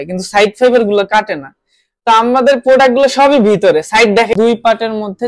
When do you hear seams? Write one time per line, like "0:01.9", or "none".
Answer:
0:04.3